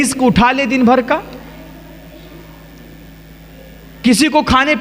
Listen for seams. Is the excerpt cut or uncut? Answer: uncut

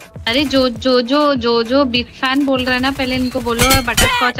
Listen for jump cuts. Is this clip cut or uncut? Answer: uncut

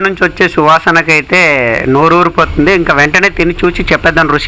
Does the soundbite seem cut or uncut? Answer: uncut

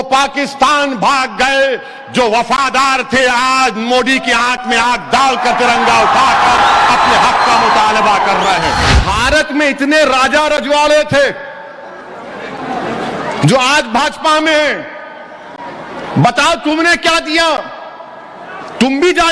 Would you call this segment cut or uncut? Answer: cut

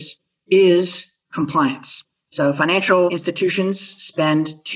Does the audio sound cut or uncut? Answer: cut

